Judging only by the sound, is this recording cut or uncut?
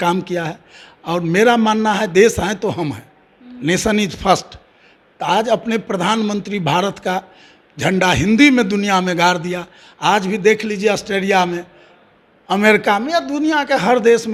uncut